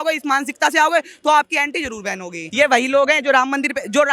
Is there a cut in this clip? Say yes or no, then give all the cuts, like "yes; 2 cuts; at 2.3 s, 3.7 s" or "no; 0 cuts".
yes; 1 cut; at 2.4 s